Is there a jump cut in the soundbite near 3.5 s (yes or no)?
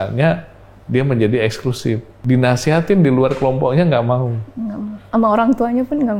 no